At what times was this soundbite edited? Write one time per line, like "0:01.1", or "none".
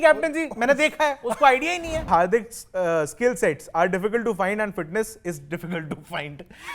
0:02.1